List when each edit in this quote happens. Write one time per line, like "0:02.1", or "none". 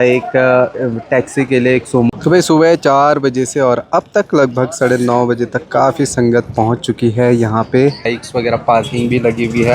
0:02.1
0:08.1